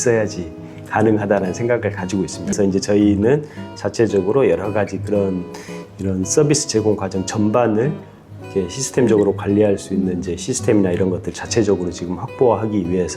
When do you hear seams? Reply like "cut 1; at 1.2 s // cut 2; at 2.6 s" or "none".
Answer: none